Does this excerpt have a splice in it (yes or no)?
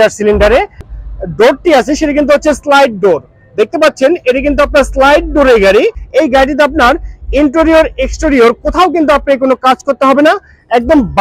yes